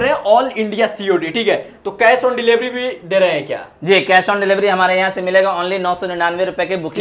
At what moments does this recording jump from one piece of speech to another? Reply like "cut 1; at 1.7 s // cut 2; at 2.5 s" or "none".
none

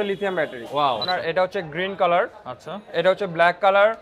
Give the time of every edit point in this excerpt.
cut 1; at 1.0 s

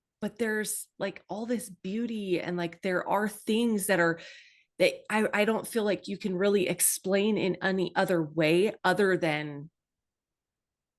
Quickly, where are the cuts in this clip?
none

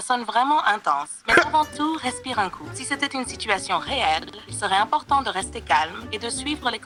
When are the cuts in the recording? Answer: none

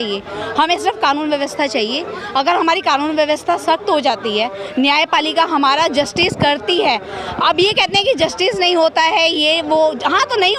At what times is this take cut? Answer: none

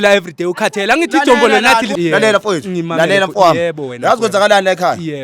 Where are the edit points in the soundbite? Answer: cut 1; at 1.9 s

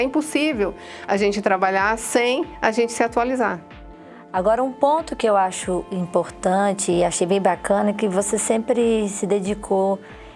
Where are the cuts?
none

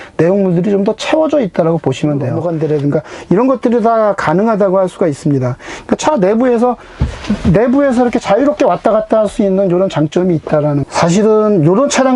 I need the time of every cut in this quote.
cut 1; at 2.4 s // cut 2; at 10.8 s

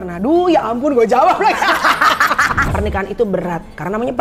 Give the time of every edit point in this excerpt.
cut 1; at 2.6 s

